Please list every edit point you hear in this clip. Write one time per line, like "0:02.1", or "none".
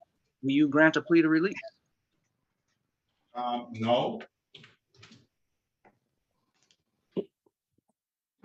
none